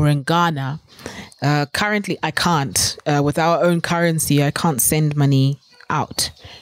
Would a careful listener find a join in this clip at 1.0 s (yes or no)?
no